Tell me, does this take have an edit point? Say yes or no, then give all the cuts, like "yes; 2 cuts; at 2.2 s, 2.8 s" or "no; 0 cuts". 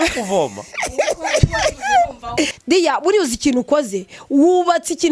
yes; 1 cut; at 2.6 s